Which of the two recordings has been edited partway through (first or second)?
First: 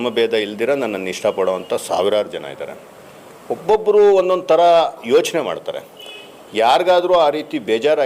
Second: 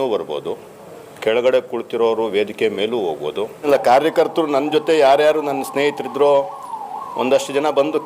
second